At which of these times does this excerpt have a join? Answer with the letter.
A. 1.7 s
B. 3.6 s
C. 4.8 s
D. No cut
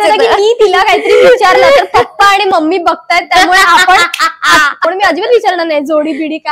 C